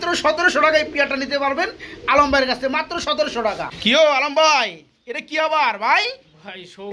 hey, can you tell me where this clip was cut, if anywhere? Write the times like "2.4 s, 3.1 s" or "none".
none